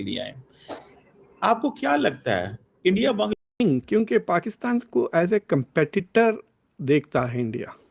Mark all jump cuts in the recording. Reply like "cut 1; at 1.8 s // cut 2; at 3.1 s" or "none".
cut 1; at 3.3 s